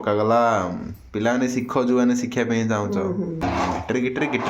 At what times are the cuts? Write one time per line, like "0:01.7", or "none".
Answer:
0:03.4

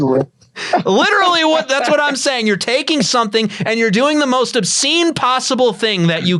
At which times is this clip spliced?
none

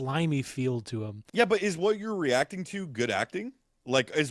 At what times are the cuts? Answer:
0:01.2

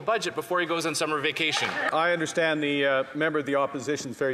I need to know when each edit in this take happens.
0:01.9

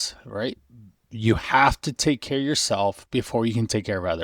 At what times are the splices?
none

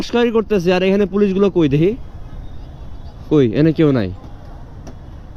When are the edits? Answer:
none

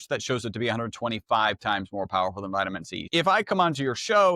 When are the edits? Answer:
0:03.1

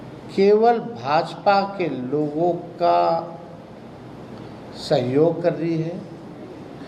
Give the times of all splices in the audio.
none

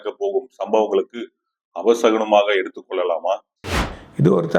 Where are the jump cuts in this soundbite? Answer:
0:03.6

